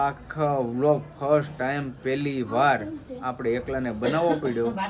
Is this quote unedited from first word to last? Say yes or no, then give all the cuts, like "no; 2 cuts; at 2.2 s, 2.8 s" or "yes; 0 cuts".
yes; 0 cuts